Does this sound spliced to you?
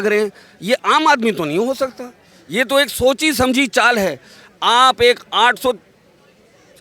no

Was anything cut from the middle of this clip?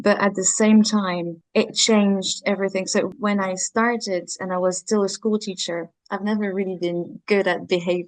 yes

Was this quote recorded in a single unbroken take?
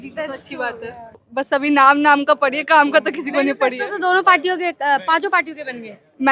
no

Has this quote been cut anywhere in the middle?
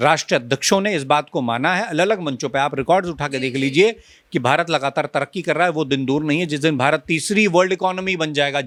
no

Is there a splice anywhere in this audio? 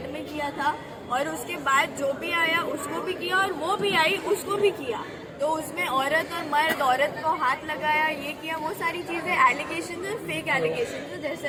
no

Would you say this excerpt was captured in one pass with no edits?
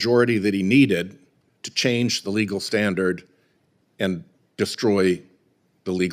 yes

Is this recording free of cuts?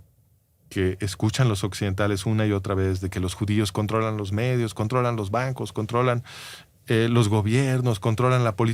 yes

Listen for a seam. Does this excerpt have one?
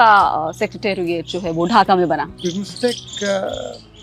yes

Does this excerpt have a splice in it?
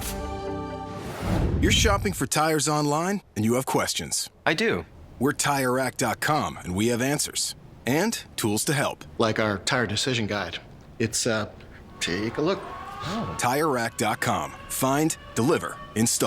yes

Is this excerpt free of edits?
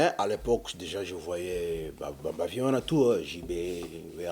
yes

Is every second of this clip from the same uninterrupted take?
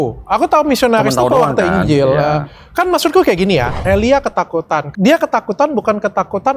no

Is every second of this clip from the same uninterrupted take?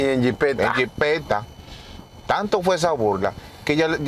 yes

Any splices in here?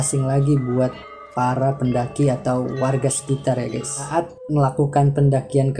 yes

